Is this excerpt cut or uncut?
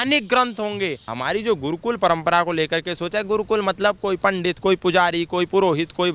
cut